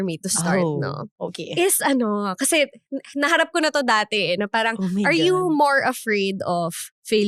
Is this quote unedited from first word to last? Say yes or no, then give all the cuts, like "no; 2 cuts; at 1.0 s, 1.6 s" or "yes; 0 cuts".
yes; 0 cuts